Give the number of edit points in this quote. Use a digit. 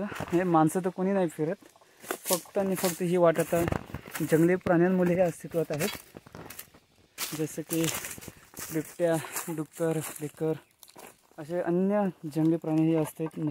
0